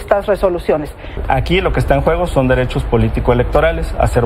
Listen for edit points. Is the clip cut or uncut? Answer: cut